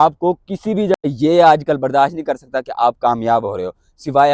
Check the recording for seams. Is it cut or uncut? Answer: cut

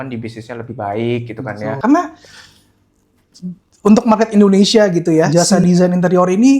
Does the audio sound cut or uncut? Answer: cut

